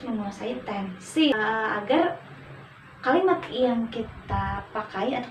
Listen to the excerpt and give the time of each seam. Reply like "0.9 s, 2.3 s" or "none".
1.3 s

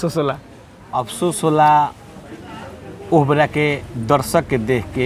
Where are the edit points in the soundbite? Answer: none

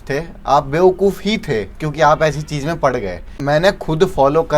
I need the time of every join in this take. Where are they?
3.3 s

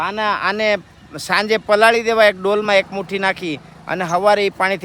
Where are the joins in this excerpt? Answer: none

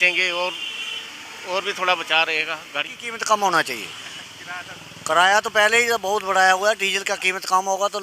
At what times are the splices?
2.9 s

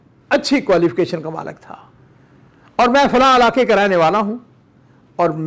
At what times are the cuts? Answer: none

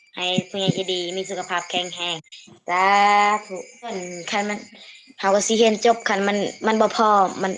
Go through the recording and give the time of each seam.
4.0 s

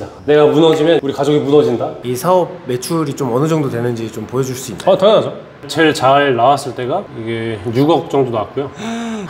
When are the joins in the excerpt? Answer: 2.0 s

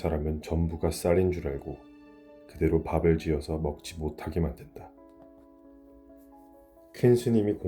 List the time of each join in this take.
5.3 s, 6.9 s

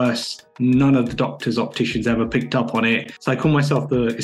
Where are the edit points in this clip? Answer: 3.1 s

